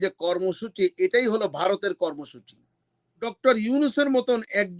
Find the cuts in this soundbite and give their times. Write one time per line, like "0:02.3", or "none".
0:03.3